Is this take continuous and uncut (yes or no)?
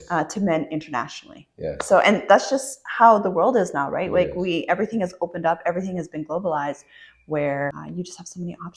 no